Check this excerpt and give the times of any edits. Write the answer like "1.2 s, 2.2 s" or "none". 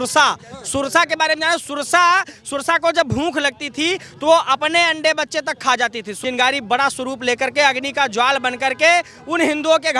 6.2 s